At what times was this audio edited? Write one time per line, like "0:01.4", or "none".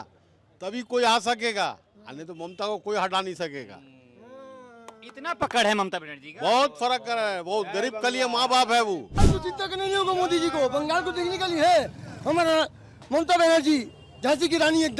0:09.1